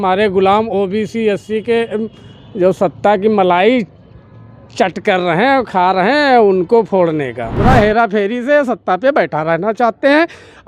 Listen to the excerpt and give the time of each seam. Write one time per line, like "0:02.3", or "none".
0:07.5